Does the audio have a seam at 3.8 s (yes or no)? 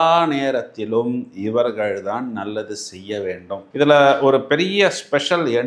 no